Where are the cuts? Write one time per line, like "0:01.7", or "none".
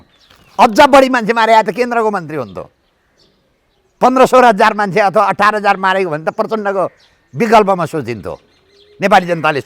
none